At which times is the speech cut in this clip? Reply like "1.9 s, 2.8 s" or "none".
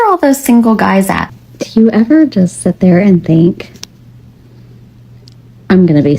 1.3 s